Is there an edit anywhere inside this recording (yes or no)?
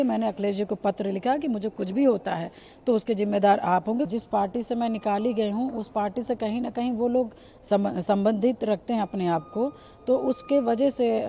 yes